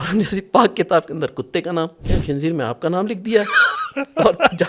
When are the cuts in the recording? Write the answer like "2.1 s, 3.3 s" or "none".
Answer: 2.1 s

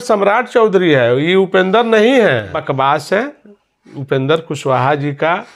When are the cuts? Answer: 2.6 s

